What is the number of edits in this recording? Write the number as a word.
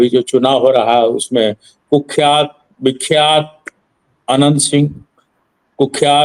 zero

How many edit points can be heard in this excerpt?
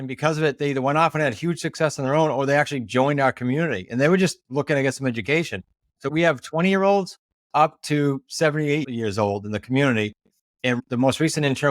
two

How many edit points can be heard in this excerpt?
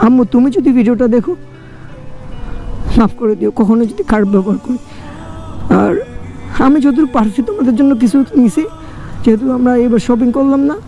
zero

